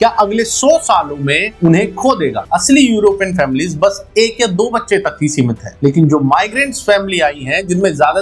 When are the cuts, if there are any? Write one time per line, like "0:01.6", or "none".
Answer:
0:02.4